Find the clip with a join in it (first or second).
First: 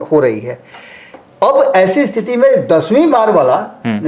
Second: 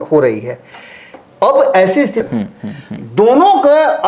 second